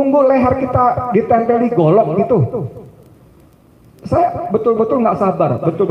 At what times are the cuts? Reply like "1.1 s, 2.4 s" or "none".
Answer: none

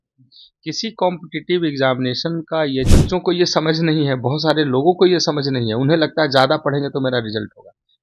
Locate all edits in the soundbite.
3.0 s

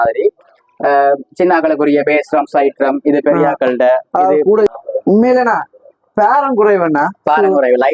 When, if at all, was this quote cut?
4.8 s

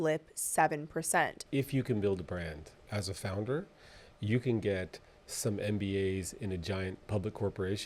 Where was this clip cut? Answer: 1.4 s

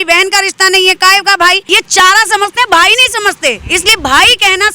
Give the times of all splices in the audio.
1.6 s

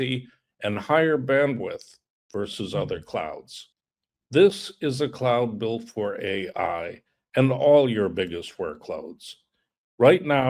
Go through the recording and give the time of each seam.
none

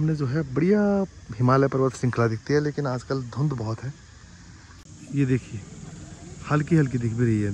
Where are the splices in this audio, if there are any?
none

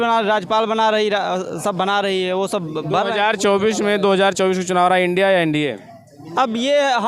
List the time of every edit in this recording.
none

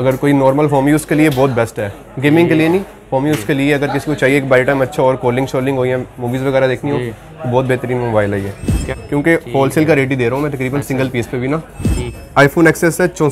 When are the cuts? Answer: 8.9 s, 12.1 s

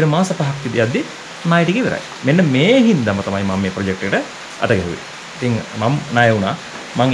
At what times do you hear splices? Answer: none

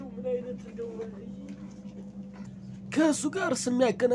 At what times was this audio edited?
2.5 s

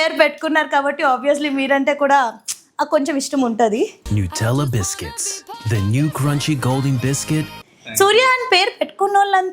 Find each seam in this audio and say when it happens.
none

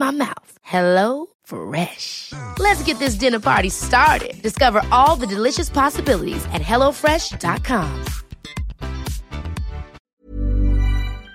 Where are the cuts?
10.0 s

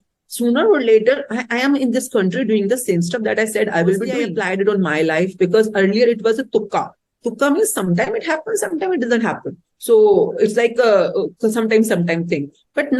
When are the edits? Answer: 4.3 s

